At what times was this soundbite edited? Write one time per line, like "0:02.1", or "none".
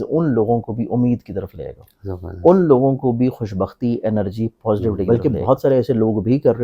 0:05.0